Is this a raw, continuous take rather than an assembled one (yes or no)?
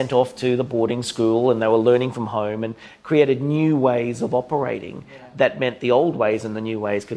yes